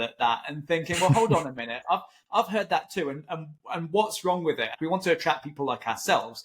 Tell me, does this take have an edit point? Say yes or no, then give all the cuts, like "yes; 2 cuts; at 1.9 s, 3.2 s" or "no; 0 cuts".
yes; 1 cut; at 4.7 s